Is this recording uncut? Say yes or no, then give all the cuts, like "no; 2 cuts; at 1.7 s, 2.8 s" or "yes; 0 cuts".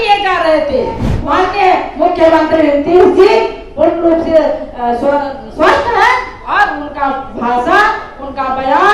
no; 1 cut; at 1.1 s